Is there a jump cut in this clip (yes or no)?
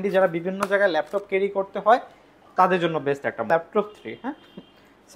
yes